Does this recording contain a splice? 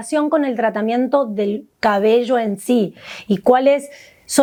no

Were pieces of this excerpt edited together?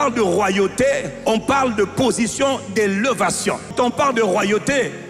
yes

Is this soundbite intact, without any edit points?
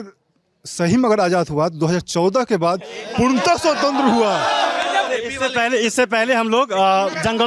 no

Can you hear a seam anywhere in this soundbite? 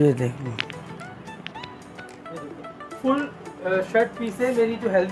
no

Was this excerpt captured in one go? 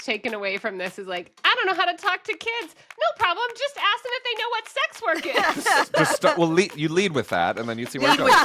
yes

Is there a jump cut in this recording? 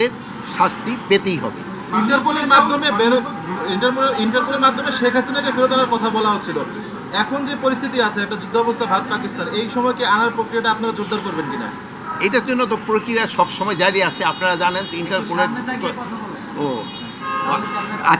no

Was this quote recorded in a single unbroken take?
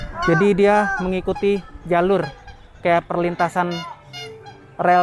yes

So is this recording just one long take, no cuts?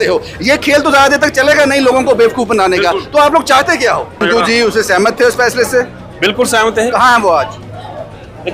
no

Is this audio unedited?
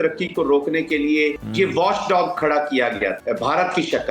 no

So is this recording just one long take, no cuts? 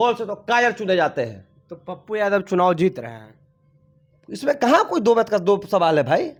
yes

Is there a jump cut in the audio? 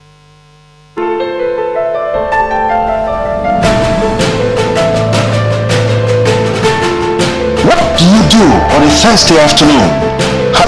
yes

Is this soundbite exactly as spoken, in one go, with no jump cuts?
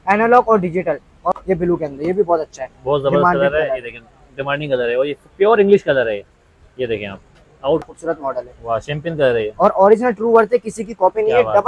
no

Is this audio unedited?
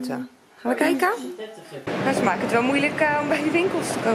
no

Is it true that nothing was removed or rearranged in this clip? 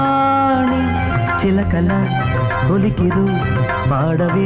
yes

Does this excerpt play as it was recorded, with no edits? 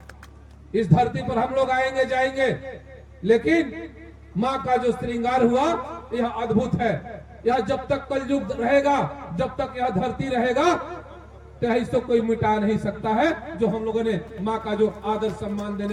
yes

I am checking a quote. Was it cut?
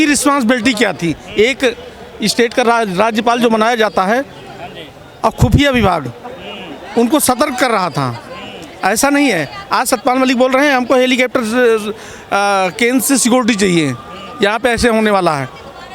no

